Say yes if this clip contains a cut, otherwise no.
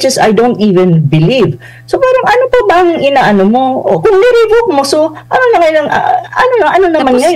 no